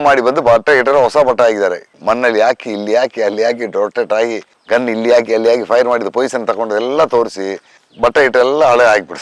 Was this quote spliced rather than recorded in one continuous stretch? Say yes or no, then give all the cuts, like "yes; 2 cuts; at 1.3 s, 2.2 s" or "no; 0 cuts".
no; 0 cuts